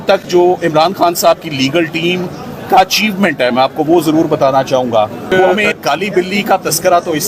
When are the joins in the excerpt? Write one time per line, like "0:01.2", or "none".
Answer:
0:05.5